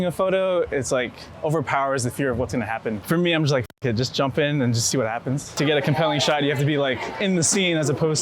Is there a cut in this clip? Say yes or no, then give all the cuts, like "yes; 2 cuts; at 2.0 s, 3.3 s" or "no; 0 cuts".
yes; 2 cuts; at 3.0 s, 5.5 s